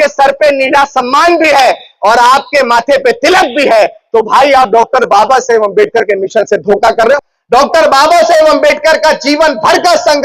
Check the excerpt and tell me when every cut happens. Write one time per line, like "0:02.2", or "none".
0:07.2